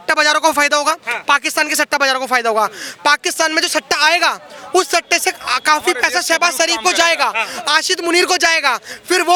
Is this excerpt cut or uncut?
uncut